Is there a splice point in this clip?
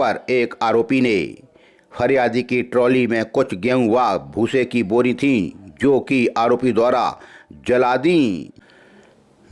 yes; 1 cut; at 8.5 s

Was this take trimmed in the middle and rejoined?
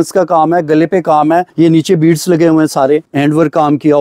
yes; 2 cuts; at 1.5 s, 3.1 s

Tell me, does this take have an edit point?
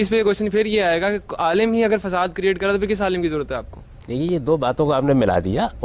no; 0 cuts

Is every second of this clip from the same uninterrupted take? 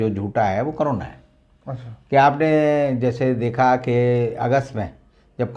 yes; 0 cuts

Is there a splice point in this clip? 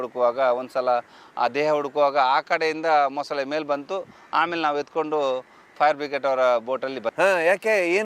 no; 0 cuts

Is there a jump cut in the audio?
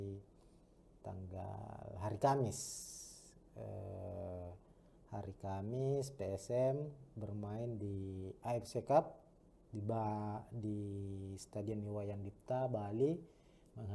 no; 0 cuts

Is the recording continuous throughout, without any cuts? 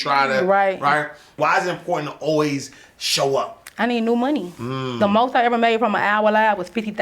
no; 1 cut; at 1.3 s

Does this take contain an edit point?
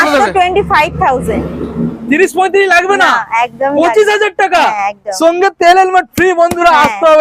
no; 0 cuts

